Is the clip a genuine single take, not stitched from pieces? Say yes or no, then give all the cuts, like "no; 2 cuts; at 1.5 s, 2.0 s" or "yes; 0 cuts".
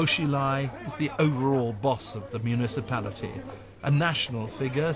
yes; 0 cuts